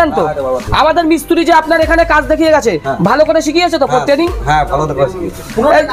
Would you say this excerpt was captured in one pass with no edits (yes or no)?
yes